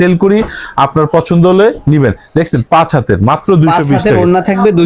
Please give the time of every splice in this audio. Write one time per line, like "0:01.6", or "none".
none